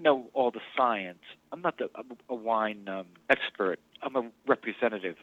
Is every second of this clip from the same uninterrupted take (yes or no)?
yes